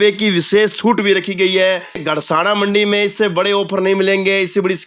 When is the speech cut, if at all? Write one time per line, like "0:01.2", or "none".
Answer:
0:02.3